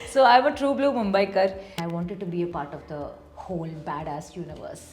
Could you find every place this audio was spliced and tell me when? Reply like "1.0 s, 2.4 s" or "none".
1.8 s